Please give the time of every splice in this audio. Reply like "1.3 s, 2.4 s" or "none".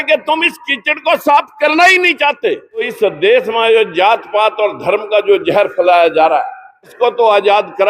2.9 s, 6.9 s

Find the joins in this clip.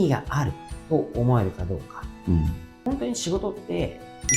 2.7 s

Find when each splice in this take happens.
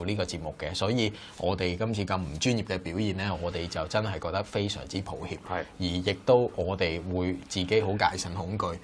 none

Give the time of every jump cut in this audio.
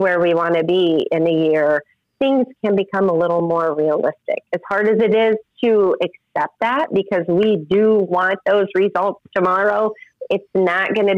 10.1 s

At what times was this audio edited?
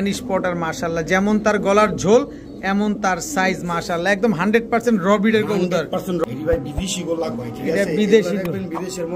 6.2 s

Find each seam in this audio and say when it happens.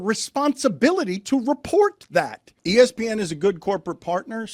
2.6 s

